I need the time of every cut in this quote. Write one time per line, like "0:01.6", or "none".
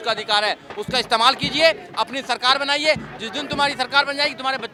none